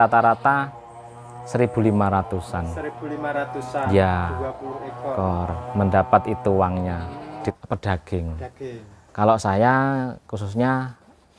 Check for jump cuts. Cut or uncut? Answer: cut